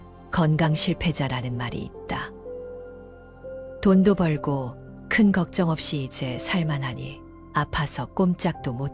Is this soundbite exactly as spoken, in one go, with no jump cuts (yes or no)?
no